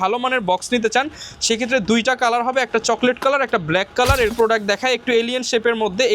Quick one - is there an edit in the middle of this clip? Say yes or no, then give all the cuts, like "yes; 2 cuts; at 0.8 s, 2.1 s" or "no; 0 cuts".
yes; 1 cut; at 4.3 s